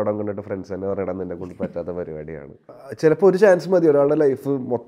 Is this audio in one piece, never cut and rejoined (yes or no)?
no